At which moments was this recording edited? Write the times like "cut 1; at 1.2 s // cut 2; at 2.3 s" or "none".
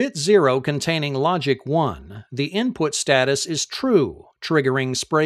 none